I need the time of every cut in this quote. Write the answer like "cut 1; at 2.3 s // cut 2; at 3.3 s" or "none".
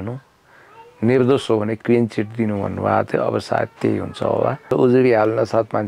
cut 1; at 4.7 s